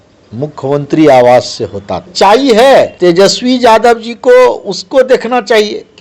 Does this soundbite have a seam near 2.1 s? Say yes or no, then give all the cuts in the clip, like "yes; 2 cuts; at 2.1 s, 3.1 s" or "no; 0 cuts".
yes; 2 cuts; at 2.1 s, 2.9 s